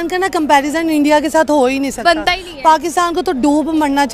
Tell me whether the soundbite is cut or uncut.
uncut